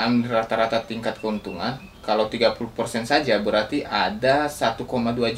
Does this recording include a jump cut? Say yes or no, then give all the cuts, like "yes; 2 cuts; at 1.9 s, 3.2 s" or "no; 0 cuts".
no; 0 cuts